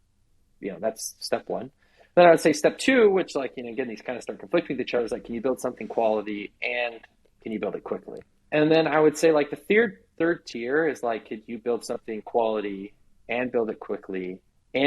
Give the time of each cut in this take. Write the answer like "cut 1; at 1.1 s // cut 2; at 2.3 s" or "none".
cut 1; at 8.3 s